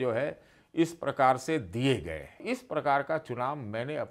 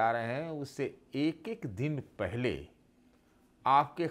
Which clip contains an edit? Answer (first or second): first